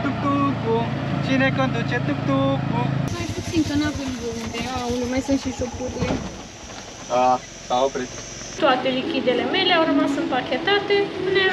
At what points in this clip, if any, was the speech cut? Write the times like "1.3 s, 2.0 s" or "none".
3.1 s, 8.5 s